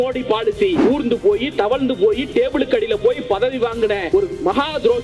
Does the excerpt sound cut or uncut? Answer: cut